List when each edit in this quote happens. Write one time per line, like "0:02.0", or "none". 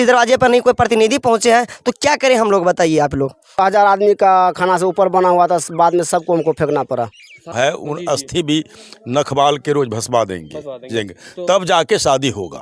0:03.6
0:07.4

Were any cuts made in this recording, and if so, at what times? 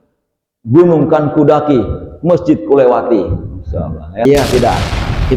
0:04.2

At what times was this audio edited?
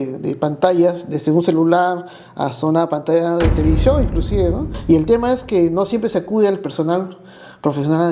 0:04.7

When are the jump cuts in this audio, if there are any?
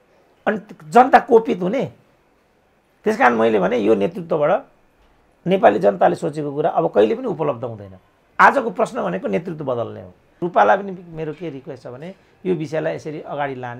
0:10.4

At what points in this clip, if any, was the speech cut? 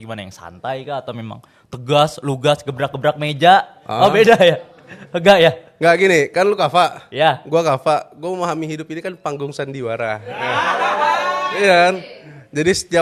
none

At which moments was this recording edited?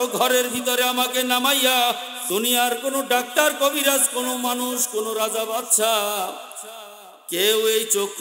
0:02.1

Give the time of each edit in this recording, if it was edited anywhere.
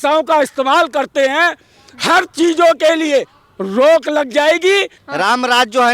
0:04.9

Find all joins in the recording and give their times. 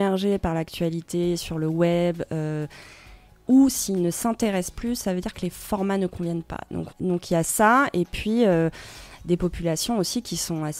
0:06.8

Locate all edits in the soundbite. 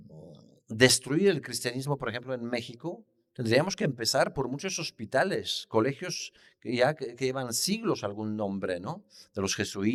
none

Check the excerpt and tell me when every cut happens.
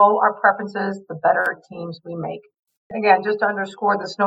none

